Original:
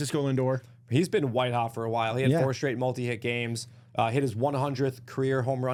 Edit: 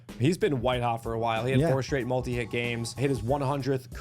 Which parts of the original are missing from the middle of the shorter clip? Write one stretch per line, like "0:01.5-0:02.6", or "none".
0:03.7-0:04.1